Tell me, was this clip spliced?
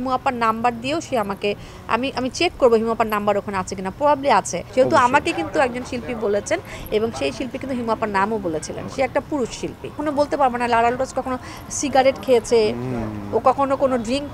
yes; 2 cuts; at 4.6 s, 10.0 s

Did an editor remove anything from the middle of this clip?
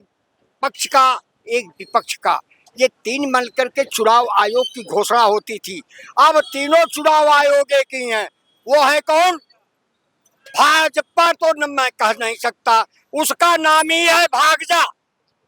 no; 0 cuts

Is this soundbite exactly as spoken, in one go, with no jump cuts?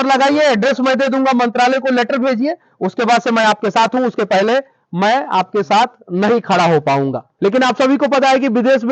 no; 1 cut; at 7.2 s

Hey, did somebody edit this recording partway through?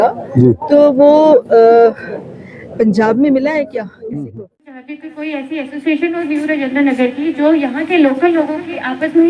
yes; 1 cut; at 4.9 s

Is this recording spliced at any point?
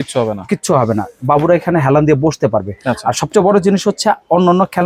no; 0 cuts

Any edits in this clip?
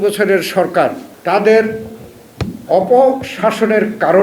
yes; 1 cut; at 1.1 s

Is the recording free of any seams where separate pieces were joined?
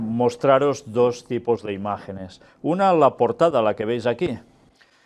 no; 1 cut; at 2.9 s

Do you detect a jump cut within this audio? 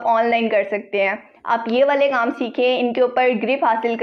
no; 0 cuts

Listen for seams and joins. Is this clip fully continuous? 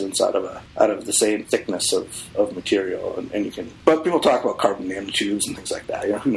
no; 1 cut; at 3.6 s

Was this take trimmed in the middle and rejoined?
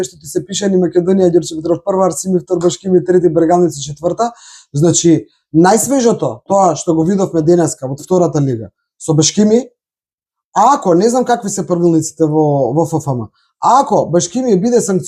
no; 0 cuts

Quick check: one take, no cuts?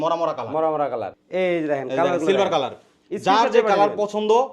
no; 1 cut; at 1.1 s

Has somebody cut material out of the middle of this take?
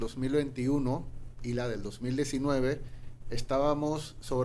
no; 0 cuts

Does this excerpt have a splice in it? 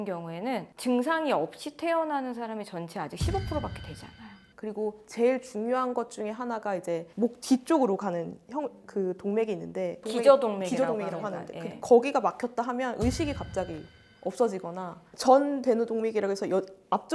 yes; 2 cuts; at 4.6 s, 15.1 s

